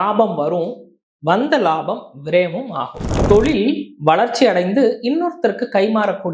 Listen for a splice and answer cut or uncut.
cut